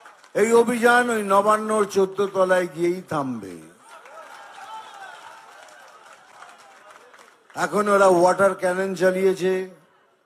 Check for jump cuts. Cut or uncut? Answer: uncut